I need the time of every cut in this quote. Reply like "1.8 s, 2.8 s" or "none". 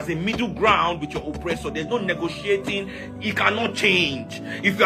none